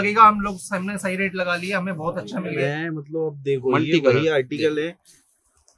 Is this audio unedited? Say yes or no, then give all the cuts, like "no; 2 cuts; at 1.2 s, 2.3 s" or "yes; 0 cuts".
no; 1 cut; at 2.6 s